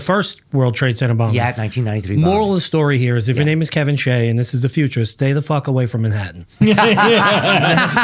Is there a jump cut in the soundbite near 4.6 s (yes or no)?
no